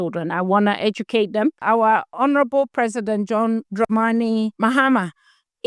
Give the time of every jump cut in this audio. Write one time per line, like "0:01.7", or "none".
0:01.9
0:03.7
0:04.5